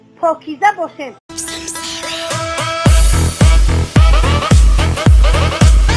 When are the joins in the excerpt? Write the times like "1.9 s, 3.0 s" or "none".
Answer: none